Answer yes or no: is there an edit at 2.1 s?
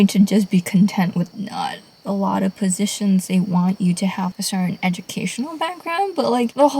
yes